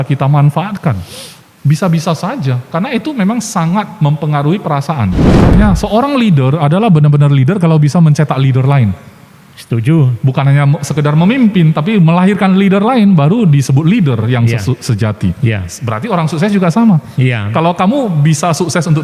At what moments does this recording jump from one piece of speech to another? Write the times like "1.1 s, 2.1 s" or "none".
5.5 s